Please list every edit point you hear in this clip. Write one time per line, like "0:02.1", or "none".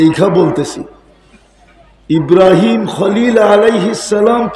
none